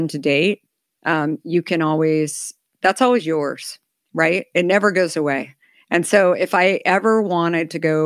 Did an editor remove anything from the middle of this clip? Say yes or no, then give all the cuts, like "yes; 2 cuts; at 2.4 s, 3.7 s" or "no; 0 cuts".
no; 0 cuts